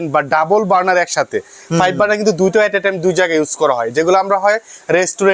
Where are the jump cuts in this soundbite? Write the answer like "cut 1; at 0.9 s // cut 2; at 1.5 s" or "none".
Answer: none